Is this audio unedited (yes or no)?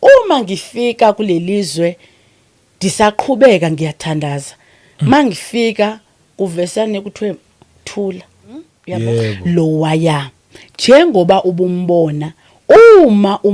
no